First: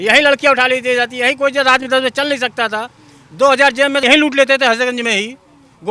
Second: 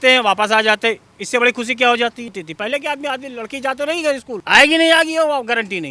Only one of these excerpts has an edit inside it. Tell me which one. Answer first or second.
second